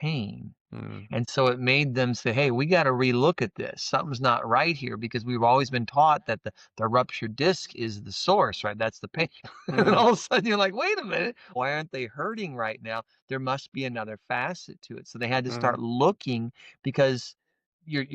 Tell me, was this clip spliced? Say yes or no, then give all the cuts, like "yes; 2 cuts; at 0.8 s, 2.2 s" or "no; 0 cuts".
yes; 2 cuts; at 9.4 s, 11.5 s